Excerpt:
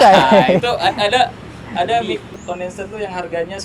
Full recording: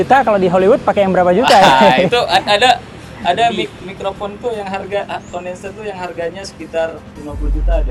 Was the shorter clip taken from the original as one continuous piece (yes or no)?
no